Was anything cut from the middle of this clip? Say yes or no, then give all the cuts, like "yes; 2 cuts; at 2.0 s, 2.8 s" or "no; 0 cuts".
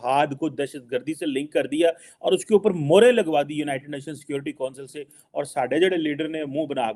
no; 0 cuts